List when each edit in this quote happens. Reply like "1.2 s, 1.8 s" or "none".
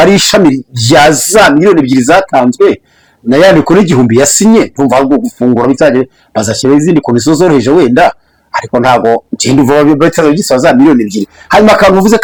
none